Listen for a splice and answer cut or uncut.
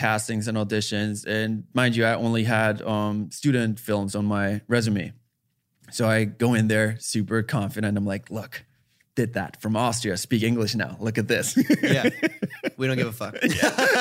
uncut